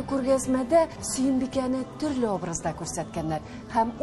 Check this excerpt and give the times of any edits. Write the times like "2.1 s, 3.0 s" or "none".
1.0 s